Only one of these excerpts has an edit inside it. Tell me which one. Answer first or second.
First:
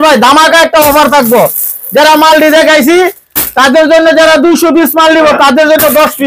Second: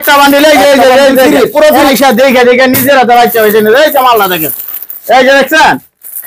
second